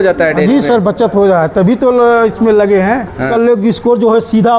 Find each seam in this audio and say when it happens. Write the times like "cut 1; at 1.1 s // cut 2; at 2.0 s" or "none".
cut 1; at 3.3 s